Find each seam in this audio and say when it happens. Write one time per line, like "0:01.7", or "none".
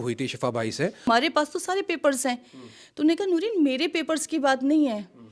0:01.1